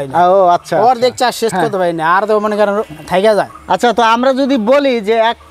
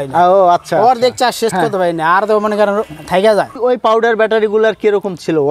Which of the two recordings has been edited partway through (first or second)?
second